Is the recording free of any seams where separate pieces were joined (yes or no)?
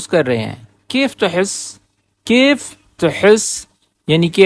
yes